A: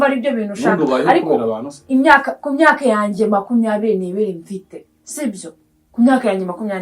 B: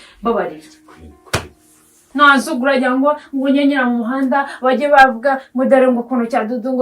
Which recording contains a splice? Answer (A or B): B